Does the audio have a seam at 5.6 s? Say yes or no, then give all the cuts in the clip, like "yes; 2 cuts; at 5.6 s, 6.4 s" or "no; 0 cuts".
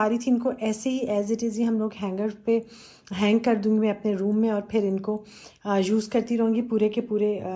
no; 0 cuts